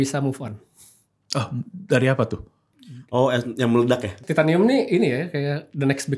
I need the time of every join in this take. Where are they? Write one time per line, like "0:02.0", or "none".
0:04.2